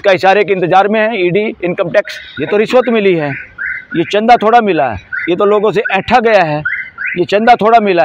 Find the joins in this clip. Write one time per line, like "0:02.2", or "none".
0:02.2